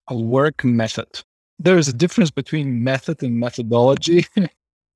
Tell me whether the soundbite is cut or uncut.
uncut